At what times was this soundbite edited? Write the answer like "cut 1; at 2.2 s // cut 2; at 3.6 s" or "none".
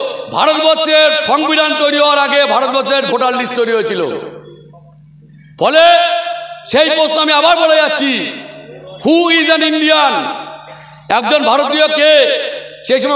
none